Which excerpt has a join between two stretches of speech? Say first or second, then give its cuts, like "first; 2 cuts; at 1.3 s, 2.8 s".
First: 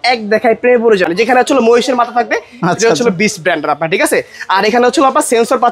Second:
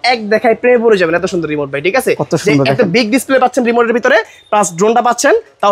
first; 1 cut; at 1.1 s